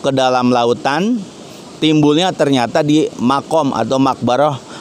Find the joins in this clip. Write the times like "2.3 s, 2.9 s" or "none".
none